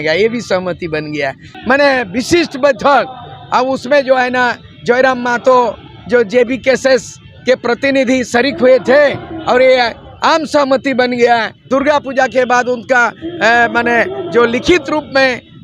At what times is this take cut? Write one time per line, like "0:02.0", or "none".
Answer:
0:01.5
0:11.5